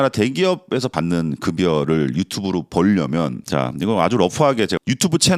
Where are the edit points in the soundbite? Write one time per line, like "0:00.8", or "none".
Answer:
0:00.9